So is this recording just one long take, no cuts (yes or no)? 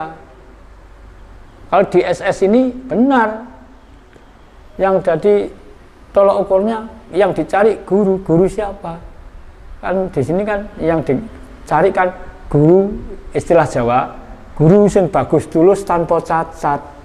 yes